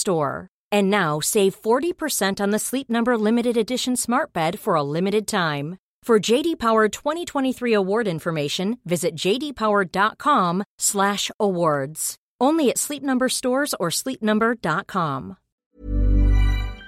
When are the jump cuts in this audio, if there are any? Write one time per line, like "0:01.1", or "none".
0:15.8